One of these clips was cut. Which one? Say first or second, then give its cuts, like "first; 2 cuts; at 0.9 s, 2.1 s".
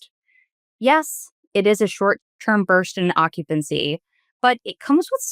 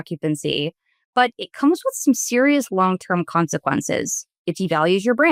first; 1 cut; at 2.3 s